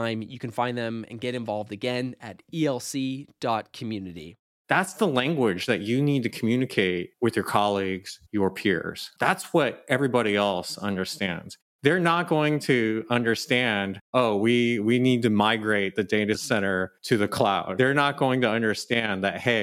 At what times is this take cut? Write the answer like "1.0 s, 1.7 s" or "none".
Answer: 4.6 s, 17.7 s